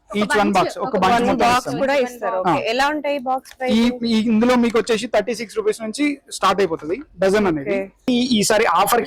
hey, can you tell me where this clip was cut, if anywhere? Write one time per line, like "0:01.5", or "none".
0:08.1